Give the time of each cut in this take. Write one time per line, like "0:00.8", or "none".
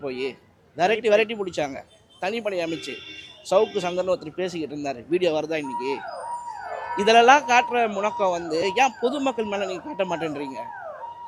none